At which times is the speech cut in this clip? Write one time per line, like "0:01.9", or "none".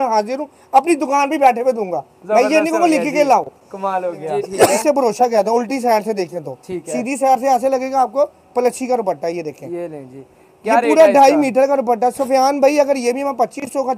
0:04.7